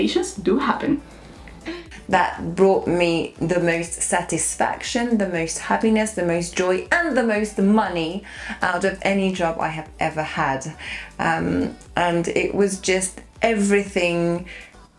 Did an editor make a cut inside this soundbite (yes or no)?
yes